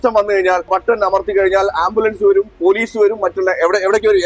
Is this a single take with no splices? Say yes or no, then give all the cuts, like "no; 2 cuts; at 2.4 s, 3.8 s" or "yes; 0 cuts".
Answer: yes; 0 cuts